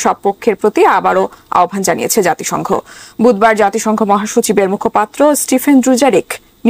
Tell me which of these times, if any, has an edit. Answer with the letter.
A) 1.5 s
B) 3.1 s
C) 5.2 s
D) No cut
D